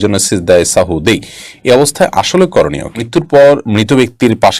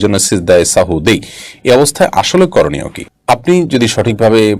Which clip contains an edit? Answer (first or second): first